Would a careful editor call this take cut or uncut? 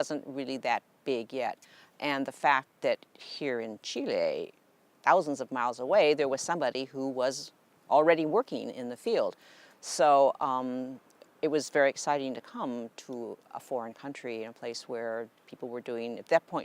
cut